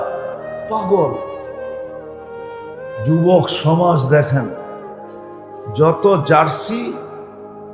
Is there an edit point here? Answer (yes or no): no